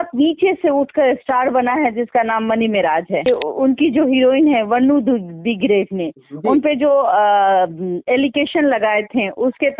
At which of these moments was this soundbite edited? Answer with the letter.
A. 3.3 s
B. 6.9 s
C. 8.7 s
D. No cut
A